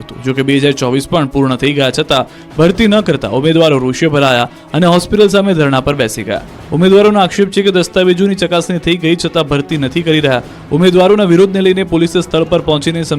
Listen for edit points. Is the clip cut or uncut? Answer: cut